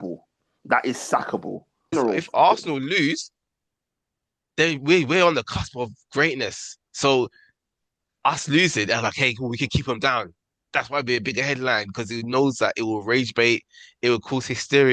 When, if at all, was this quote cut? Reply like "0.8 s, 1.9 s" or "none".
1.9 s